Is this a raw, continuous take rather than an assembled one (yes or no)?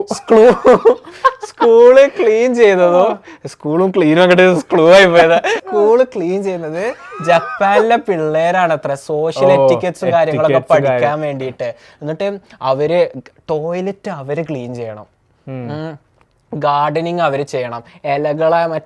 no